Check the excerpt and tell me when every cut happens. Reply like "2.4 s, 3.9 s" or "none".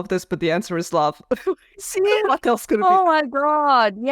2.8 s